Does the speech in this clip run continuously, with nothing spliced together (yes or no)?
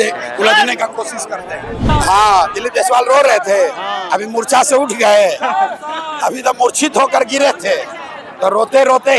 no